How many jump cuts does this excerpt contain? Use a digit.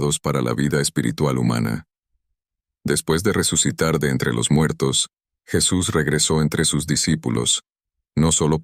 0